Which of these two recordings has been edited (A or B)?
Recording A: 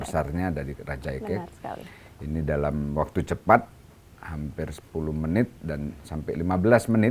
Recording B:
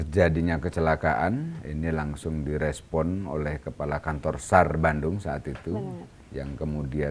B